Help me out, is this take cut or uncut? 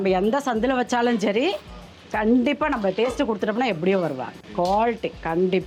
uncut